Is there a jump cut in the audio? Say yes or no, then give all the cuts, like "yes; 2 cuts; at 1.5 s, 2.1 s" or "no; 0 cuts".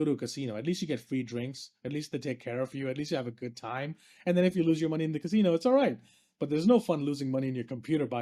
no; 0 cuts